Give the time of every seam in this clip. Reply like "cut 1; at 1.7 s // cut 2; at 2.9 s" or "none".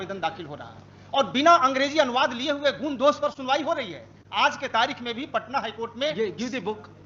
none